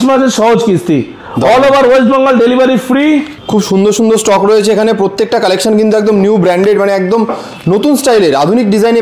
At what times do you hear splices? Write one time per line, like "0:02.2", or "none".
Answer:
0:03.4